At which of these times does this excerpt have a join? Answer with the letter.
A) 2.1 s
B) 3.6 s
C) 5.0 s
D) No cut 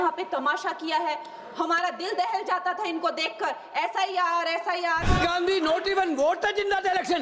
C